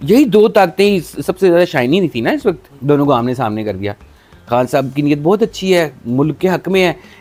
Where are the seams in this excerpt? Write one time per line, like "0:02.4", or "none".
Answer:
none